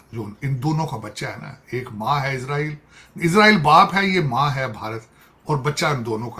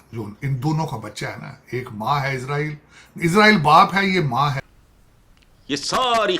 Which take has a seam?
second; 1 cut; at 4.6 s

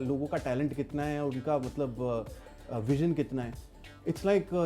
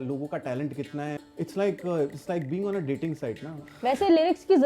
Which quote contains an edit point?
second; 2 cuts; at 1.2 s, 3.6 s

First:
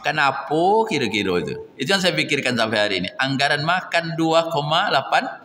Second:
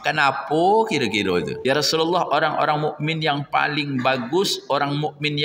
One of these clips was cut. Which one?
second; 1 cut; at 1.5 s

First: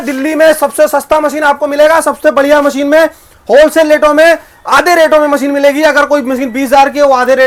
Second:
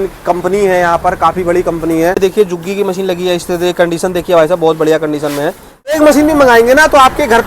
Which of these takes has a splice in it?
second; 2 cuts; at 2.2 s, 5.9 s

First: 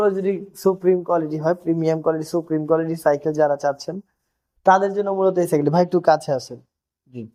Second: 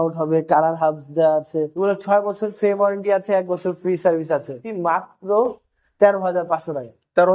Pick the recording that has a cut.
second; 2 cuts; at 1.8 s, 4.6 s

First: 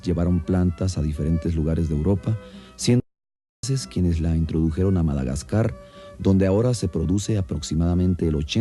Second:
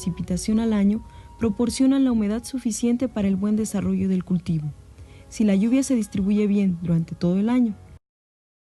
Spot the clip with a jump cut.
second; 1 cut; at 2.3 s

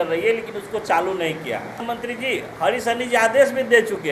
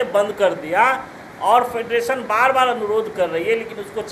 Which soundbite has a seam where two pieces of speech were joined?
first; 1 cut; at 1.8 s

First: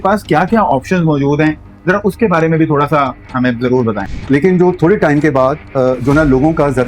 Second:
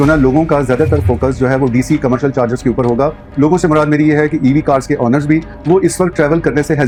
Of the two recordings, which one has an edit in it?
first; 1 cut; at 4.1 s

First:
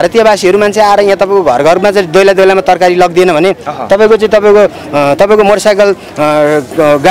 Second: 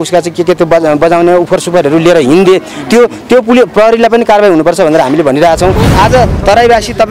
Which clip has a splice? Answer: second; 1 cut; at 5.8 s

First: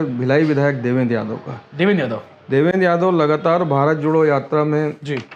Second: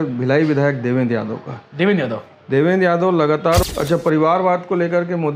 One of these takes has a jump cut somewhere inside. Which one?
second; 1 cut; at 3.7 s

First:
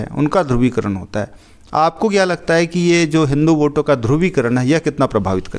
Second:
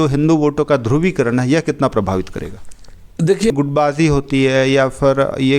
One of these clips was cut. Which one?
second; 1 cut; at 3.5 s

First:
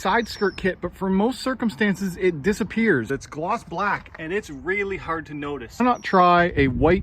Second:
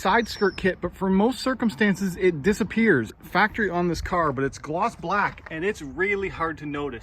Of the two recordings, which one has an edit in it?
first; 2 cuts; at 3.1 s, 5.8 s

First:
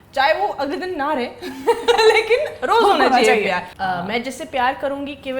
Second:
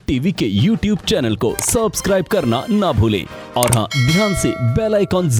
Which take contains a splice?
first; 1 cut; at 3.7 s

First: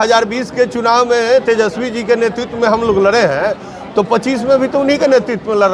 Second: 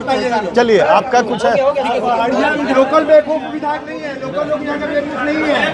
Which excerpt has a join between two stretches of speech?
second; 1 cut; at 2.7 s

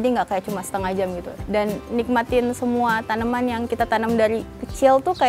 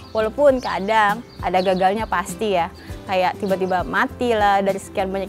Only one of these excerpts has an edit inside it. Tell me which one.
first; 1 cut; at 1.3 s

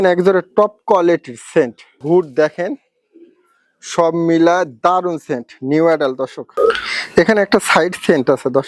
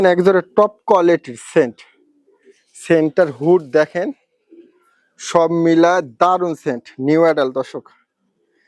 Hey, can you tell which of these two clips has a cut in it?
first; 2 cuts; at 2.0 s, 6.4 s

